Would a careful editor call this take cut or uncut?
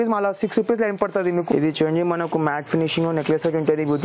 cut